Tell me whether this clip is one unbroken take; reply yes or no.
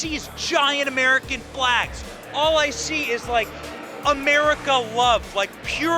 yes